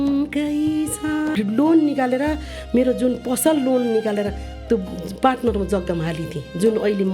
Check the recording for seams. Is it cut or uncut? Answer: cut